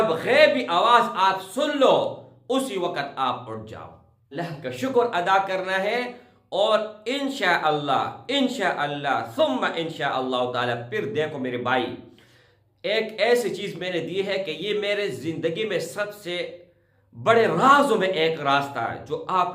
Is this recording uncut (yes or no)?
no